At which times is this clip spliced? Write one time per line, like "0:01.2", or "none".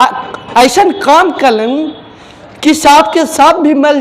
none